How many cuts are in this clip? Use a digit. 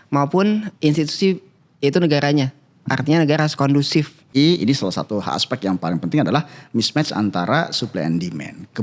1